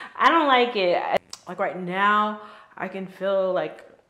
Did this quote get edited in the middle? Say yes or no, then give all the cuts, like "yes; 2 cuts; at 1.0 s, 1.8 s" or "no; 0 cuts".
yes; 1 cut; at 1.2 s